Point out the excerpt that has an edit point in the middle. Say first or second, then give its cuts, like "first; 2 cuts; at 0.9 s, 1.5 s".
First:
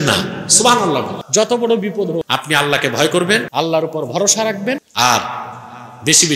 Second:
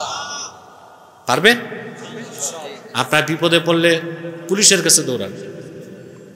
first; 4 cuts; at 1.2 s, 2.2 s, 3.5 s, 4.9 s